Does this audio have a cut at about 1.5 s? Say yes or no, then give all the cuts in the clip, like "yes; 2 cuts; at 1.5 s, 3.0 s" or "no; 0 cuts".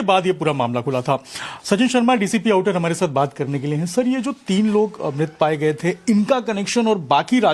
no; 1 cut; at 5.3 s